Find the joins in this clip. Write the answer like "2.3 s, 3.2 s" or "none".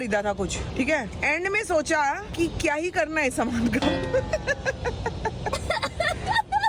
5.5 s